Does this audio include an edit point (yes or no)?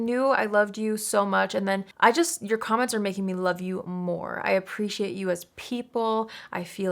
yes